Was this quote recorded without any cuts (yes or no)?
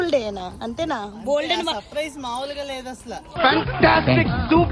no